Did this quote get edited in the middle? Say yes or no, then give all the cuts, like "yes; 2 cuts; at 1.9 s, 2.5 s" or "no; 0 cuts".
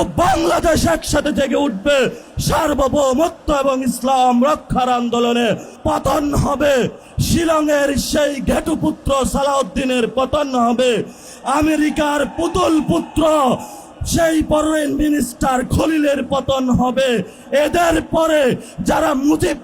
yes; 2 cuts; at 5.7 s, 7.0 s